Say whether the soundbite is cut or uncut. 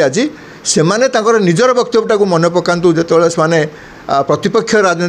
uncut